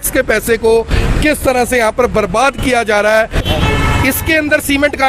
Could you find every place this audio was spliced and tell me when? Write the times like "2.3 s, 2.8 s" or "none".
3.4 s